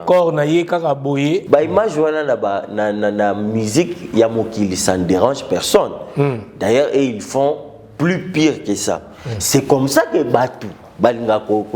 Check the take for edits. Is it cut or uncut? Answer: cut